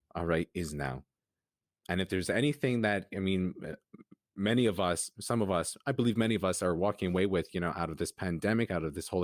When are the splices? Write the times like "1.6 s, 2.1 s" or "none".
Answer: 1.6 s

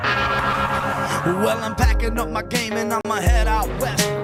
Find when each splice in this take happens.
none

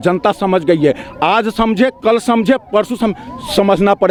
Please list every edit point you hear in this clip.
none

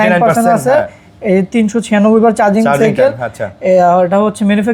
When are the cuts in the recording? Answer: none

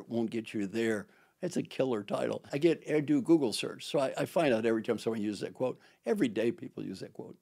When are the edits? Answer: 2.5 s

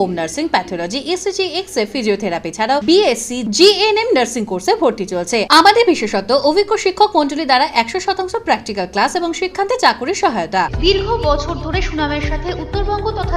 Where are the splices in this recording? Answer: none

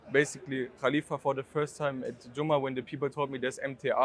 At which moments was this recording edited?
none

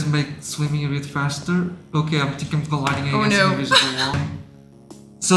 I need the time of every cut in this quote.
4.2 s

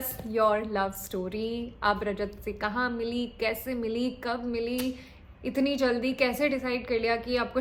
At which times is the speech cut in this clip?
none

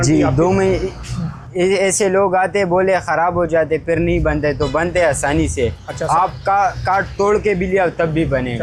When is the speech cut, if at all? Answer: none

